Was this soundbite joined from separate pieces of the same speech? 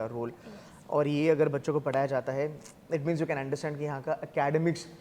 no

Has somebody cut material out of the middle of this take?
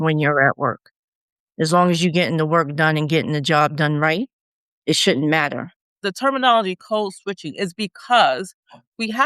yes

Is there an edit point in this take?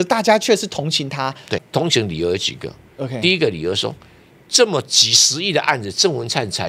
yes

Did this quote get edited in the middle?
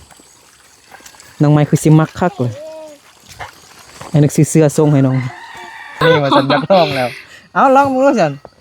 yes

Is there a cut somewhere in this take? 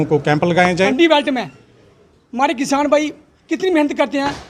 yes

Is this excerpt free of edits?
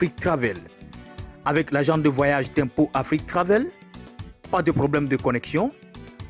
yes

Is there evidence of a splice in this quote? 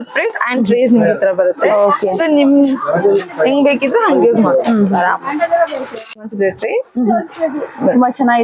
no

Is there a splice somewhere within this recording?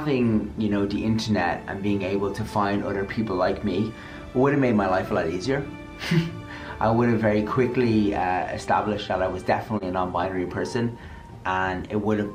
no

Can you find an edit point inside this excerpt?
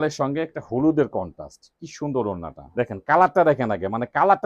yes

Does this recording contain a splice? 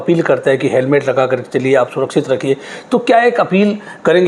no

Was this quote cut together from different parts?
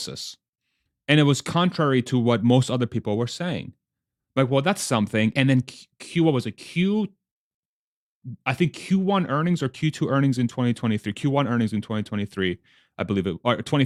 no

